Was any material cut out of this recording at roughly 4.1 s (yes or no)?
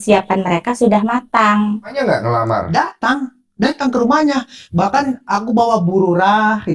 no